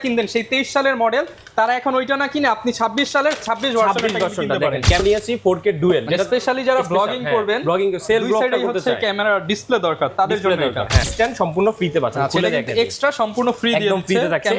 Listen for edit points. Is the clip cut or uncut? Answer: cut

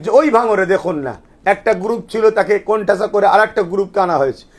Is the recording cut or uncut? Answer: uncut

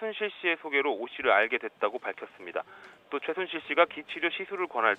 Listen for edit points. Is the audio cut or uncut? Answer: uncut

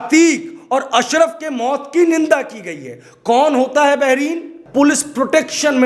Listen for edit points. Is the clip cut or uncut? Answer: cut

